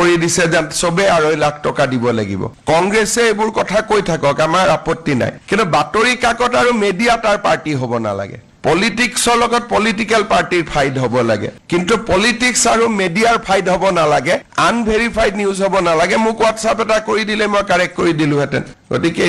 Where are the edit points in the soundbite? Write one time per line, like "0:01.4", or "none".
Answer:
0:02.5
0:08.5